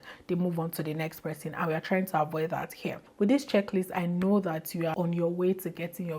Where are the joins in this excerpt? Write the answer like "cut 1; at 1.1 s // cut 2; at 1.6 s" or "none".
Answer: cut 1; at 3.0 s // cut 2; at 4.9 s